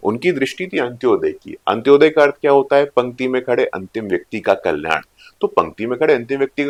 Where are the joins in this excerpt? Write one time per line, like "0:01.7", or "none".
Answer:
none